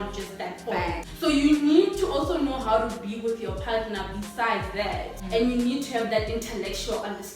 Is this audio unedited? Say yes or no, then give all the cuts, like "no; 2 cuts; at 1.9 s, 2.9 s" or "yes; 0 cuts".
no; 2 cuts; at 1.1 s, 5.2 s